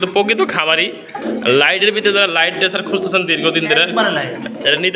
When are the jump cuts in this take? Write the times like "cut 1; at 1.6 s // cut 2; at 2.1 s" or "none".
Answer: none